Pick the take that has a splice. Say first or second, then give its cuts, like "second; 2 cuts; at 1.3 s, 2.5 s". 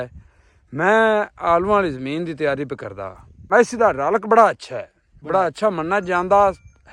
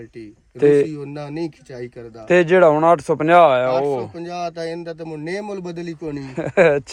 first; 1 cut; at 3.3 s